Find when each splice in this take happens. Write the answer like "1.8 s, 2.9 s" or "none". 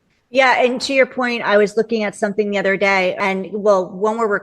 3.2 s